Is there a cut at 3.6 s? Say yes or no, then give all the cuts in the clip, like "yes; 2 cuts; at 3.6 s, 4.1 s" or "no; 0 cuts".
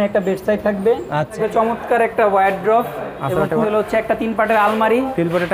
yes; 2 cuts; at 1.4 s, 3.6 s